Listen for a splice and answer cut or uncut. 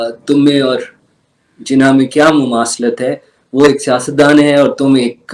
uncut